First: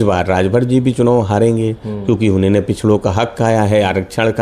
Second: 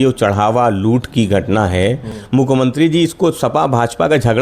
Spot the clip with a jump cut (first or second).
second